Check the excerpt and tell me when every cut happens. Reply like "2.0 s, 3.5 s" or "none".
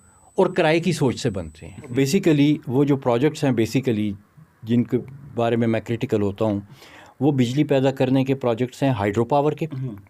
1.9 s